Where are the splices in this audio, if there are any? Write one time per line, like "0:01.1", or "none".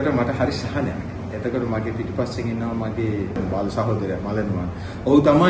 none